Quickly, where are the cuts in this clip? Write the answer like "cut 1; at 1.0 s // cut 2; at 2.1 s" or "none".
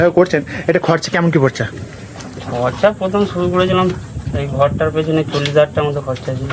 none